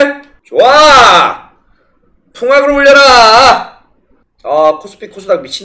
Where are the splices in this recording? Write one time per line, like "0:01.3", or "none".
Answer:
0:03.9

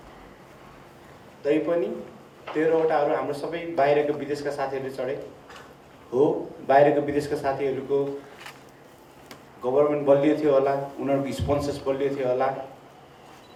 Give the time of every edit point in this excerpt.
none

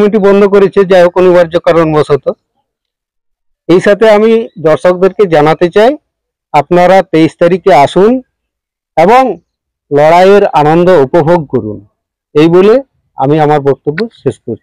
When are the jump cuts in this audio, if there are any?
none

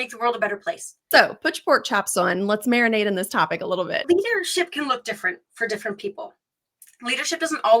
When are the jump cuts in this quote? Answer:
0:01.0
0:04.0

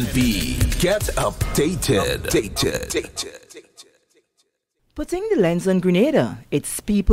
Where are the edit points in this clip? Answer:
0:04.9

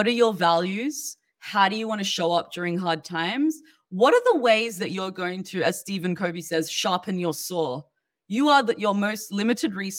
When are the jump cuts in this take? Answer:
none

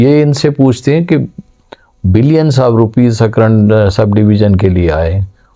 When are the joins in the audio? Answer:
none

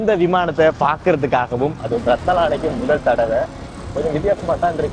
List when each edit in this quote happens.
0:01.8
0:03.8

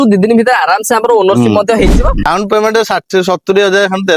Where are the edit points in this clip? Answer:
0:02.3

